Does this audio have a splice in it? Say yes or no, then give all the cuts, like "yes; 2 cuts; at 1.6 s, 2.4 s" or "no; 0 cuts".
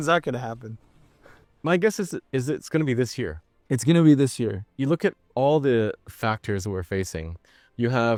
no; 0 cuts